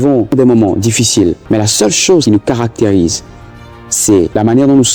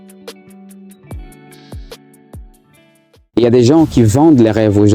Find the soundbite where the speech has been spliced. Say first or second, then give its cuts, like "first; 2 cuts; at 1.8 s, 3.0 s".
second; 1 cut; at 3.2 s